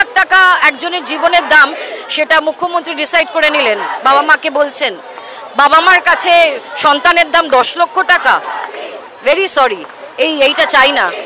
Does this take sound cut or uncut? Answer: uncut